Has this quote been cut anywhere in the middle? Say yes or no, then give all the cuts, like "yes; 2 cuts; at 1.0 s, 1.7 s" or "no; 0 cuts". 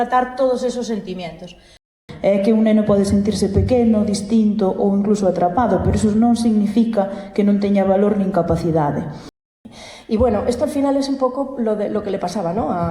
yes; 2 cuts; at 2.0 s, 9.4 s